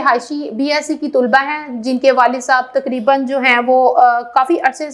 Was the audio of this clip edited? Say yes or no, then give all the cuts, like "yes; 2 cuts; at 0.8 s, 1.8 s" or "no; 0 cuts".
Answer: no; 0 cuts